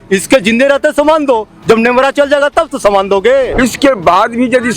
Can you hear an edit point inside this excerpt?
yes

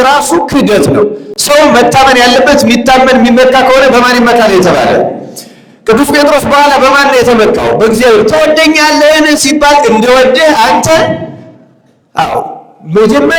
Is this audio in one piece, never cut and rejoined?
yes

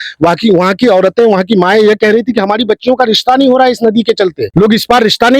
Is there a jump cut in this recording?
yes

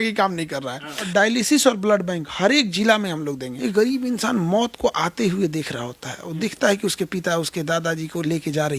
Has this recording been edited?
yes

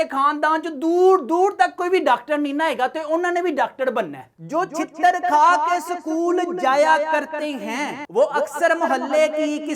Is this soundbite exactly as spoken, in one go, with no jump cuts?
no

